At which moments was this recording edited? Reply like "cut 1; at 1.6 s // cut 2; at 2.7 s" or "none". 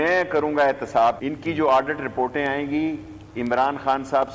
cut 1; at 1.2 s